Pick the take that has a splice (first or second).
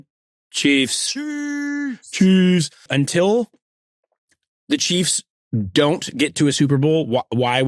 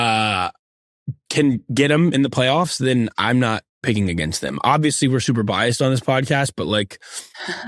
first